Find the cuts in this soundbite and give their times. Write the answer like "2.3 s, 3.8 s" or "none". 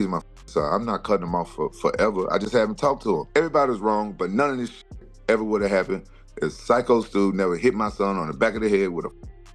3.2 s